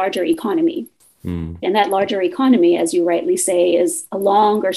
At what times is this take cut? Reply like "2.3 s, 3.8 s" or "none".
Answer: 1.6 s